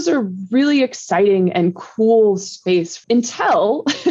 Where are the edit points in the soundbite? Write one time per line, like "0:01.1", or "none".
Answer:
0:03.0